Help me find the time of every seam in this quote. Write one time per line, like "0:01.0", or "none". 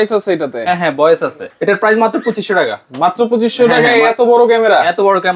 0:01.4